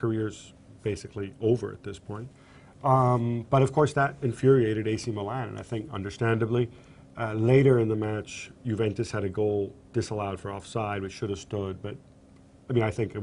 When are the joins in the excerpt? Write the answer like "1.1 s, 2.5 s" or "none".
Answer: 10.0 s